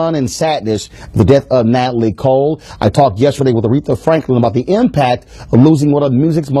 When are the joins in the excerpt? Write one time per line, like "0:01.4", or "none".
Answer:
none